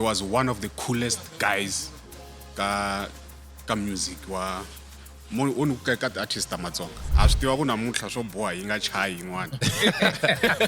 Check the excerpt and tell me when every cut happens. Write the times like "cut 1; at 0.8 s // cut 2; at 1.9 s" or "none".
cut 1; at 7.0 s